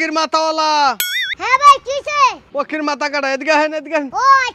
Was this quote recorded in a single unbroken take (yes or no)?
no